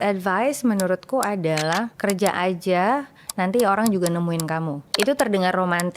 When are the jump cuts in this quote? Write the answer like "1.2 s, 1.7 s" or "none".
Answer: 1.9 s, 4.8 s

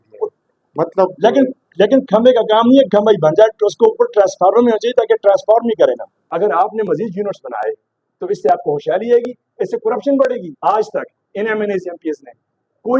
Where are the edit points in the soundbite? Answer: 6.2 s, 10.5 s

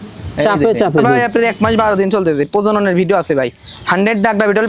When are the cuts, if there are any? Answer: 1.2 s

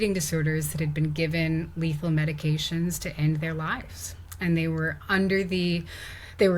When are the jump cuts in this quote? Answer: none

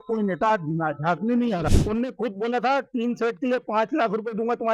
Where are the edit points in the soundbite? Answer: 1.7 s

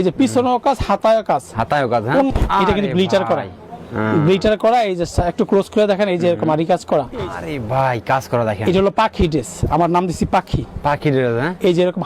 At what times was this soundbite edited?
2.3 s, 7.5 s

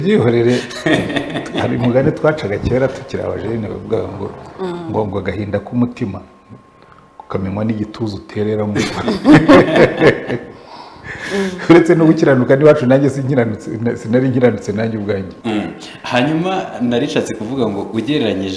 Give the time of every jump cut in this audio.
15.3 s

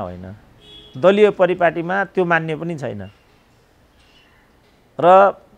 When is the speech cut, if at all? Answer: none

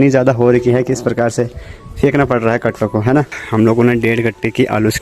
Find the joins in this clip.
3.4 s

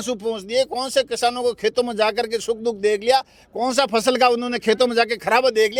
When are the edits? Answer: none

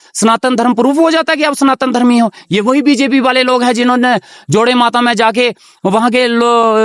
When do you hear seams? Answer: none

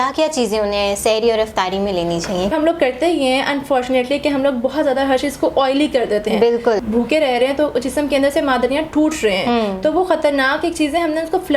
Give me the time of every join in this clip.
2.5 s, 6.8 s

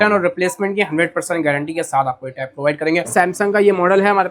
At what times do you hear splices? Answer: 3.1 s

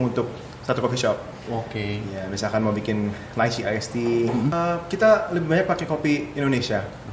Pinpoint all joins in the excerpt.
4.5 s

